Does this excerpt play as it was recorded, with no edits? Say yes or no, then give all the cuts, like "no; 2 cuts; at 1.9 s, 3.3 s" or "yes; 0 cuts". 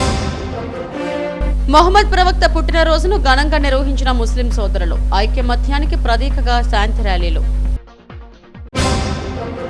yes; 0 cuts